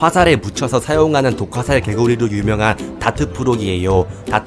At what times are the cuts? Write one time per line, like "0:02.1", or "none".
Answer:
none